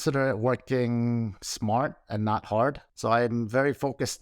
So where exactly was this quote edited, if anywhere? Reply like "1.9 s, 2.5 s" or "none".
2.9 s